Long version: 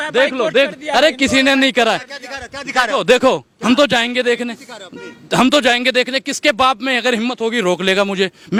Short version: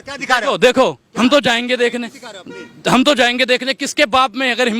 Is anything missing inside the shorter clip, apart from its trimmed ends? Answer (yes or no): no